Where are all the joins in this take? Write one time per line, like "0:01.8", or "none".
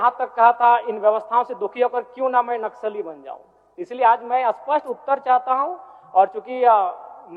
none